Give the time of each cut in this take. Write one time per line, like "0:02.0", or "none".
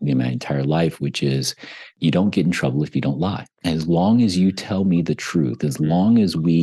0:01.9
0:03.5

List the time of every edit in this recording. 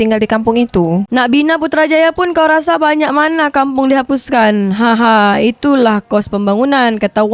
0:01.1

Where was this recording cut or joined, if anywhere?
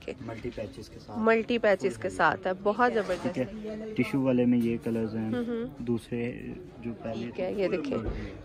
0:03.2
0:07.3

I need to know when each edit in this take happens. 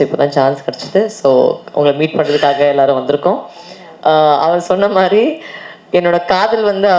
none

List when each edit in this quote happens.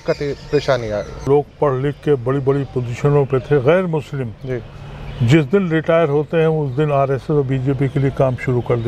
0:01.3

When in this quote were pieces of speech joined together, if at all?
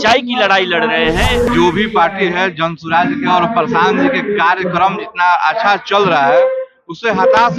0:01.5

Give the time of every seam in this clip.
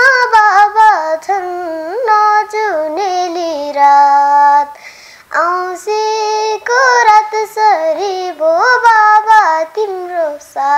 none

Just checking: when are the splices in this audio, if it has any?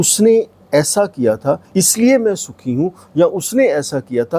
0:01.6

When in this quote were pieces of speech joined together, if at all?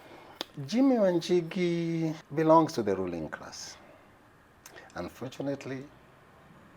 0:02.2

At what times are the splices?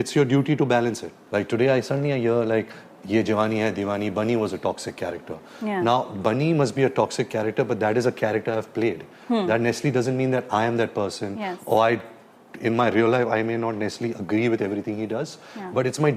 0:01.1

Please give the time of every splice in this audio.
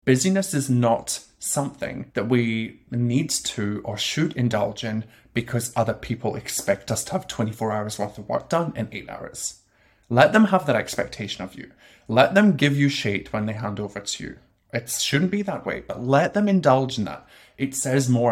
0:02.0

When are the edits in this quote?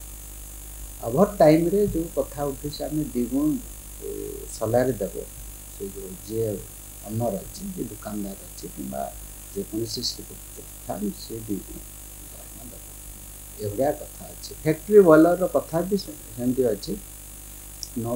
none

